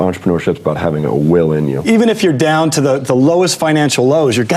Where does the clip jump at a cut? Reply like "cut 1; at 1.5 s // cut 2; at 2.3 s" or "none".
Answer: cut 1; at 1.9 s